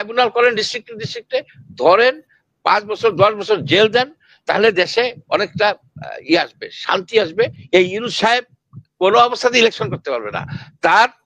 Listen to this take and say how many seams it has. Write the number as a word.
one